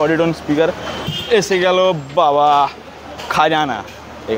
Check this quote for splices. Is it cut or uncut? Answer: cut